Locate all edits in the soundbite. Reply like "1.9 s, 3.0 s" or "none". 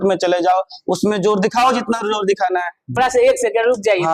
3.0 s